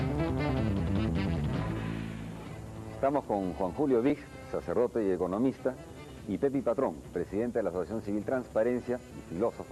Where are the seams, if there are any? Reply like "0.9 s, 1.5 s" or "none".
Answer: 4.0 s